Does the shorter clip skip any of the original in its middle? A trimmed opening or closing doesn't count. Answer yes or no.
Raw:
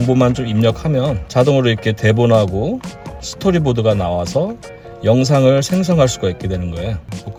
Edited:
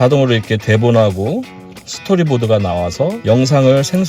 yes